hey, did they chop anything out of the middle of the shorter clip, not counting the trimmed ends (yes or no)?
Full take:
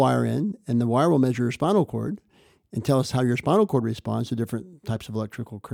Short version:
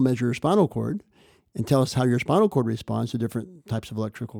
no